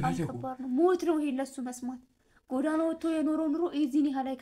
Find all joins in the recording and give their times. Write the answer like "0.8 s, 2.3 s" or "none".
none

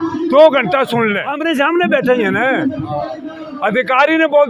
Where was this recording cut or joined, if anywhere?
1.4 s

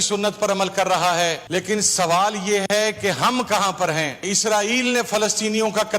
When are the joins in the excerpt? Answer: 1.4 s, 4.3 s

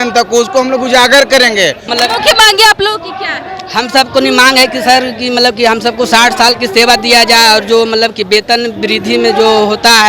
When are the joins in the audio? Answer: 1.9 s

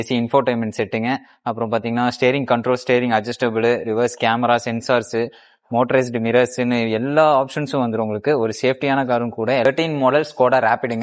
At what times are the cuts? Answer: 9.7 s

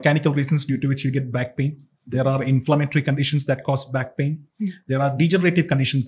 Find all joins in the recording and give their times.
none

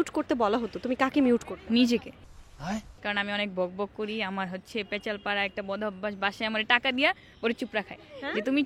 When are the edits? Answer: none

